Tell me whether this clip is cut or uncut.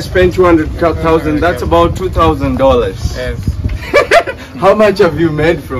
uncut